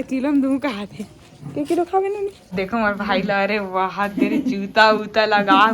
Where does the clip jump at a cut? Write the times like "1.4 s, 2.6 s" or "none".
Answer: 2.4 s